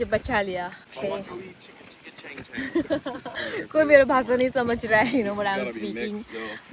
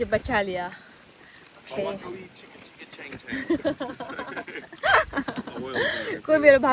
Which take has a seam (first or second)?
first